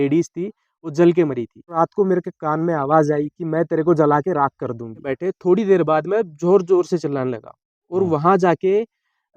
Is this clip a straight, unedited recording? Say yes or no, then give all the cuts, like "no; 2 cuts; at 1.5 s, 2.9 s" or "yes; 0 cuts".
no; 2 cuts; at 1.8 s, 5.1 s